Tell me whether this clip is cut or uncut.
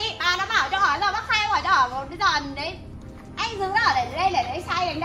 uncut